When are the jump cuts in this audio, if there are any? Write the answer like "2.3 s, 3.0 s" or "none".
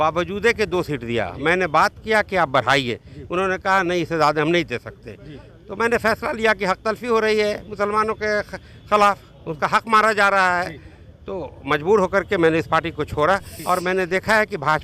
13.5 s